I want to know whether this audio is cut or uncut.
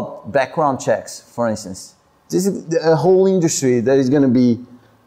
uncut